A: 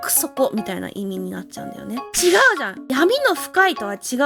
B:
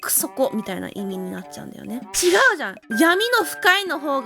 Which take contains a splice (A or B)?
B